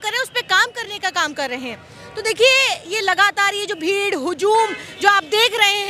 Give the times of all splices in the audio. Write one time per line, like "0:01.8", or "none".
none